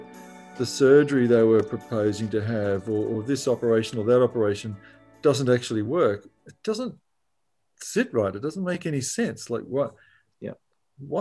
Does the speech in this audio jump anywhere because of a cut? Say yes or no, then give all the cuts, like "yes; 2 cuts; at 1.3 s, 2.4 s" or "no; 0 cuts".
no; 0 cuts